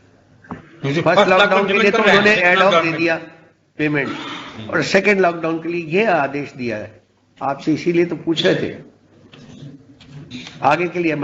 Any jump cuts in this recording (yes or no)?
yes